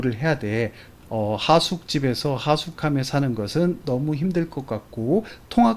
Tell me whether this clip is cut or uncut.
uncut